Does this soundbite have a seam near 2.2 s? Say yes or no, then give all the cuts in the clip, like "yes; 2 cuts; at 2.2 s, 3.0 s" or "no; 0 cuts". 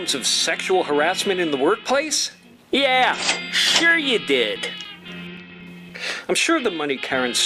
no; 1 cut; at 5.0 s